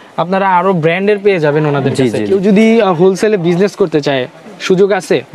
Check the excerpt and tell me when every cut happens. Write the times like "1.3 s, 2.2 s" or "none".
2.3 s